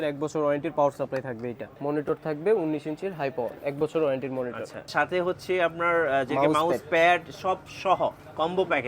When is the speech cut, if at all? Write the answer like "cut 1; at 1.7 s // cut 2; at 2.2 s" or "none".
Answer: cut 1; at 1.7 s // cut 2; at 4.9 s